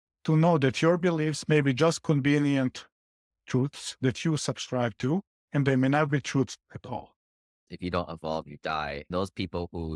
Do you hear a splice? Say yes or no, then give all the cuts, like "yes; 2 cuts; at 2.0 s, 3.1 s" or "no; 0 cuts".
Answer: yes; 1 cut; at 7.6 s